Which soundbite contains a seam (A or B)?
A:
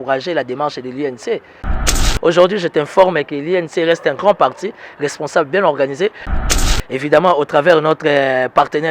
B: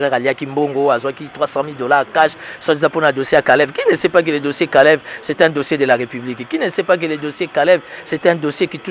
A